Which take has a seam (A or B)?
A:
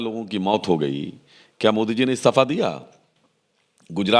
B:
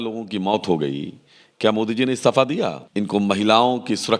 B